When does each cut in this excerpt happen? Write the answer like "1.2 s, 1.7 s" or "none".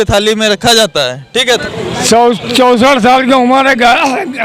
1.6 s